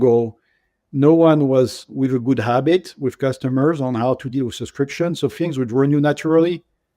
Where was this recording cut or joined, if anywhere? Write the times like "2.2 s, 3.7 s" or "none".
1.9 s